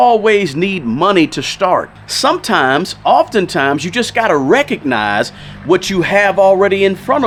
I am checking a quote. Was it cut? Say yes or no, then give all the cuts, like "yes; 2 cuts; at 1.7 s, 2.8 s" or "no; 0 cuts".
no; 0 cuts